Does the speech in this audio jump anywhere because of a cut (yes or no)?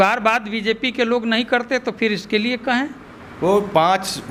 no